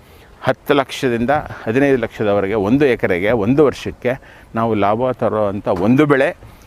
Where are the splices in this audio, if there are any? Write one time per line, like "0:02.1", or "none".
none